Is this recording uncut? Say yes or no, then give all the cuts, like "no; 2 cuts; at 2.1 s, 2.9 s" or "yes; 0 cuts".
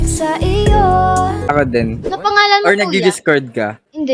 no; 1 cut; at 2.1 s